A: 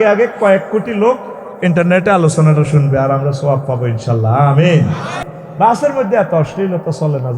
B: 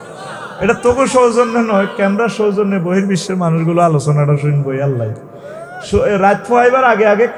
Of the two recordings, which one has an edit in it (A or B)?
A